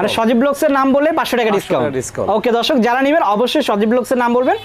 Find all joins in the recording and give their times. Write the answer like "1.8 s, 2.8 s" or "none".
none